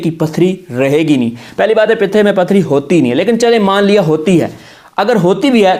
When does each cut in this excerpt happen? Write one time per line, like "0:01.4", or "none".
none

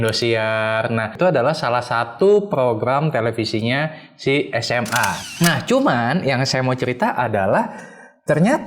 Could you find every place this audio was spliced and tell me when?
0:01.1
0:05.2

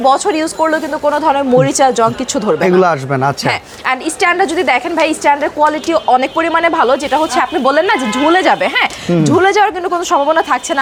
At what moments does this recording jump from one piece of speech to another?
none

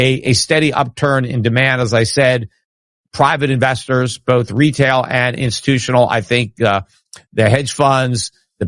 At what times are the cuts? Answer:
none

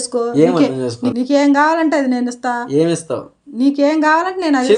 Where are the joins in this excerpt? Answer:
0:01.0

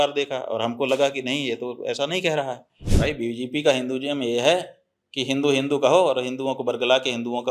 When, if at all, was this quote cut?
0:02.9

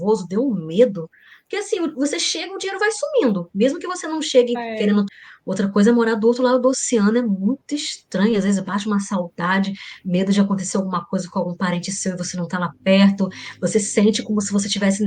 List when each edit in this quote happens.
none

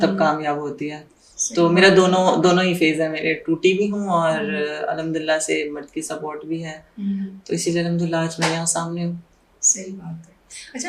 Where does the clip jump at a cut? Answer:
none

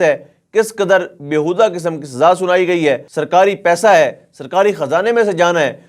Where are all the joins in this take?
0:03.1

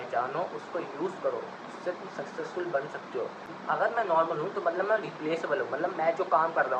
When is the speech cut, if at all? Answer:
0:03.5

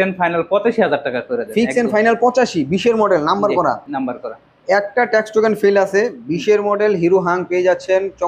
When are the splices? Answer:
none

